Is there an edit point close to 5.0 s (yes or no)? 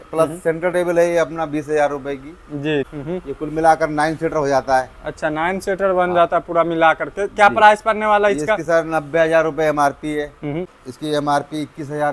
no